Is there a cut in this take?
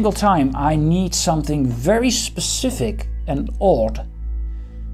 no; 0 cuts

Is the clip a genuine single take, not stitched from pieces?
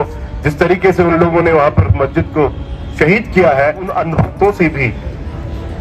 no; 1 cut; at 3.9 s

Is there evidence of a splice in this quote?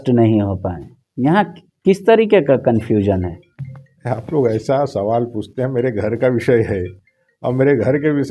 no; 0 cuts

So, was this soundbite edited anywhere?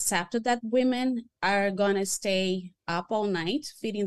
yes; 2 cuts; at 1.3 s, 2.8 s

